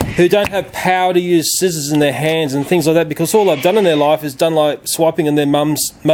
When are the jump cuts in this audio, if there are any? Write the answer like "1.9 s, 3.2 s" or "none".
none